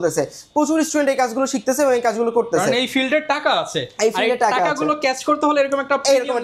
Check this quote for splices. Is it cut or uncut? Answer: uncut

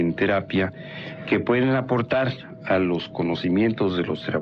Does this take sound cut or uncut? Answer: cut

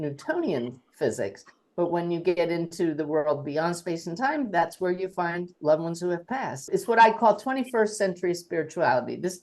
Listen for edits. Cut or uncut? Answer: cut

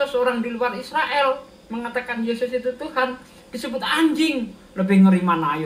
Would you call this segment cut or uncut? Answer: uncut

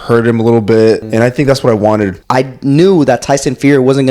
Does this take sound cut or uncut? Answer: cut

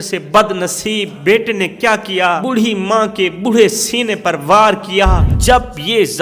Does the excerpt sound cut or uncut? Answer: cut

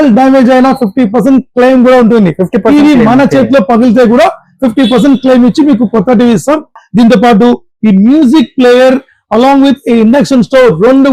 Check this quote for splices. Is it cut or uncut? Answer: cut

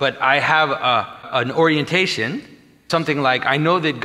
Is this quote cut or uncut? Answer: cut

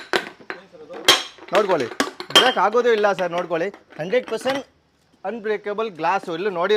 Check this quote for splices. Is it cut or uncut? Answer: uncut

